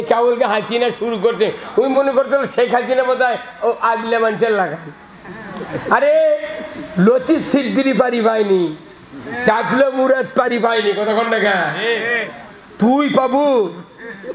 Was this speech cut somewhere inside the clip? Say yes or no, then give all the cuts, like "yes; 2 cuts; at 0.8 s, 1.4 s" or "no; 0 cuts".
no; 0 cuts